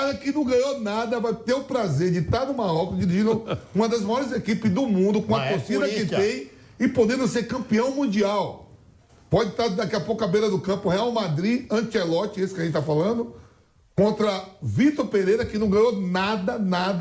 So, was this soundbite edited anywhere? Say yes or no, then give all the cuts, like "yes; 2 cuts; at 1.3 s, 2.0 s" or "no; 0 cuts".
no; 0 cuts